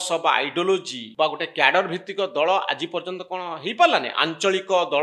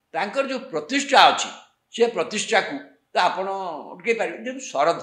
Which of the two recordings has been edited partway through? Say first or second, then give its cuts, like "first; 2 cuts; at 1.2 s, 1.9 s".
first; 1 cut; at 1.0 s